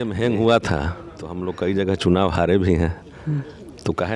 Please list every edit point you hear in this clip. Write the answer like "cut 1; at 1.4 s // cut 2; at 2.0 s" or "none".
cut 1; at 1.4 s